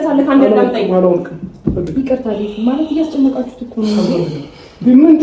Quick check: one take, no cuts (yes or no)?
yes